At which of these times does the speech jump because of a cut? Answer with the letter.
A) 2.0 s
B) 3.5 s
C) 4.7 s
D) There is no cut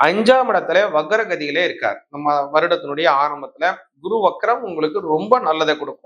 D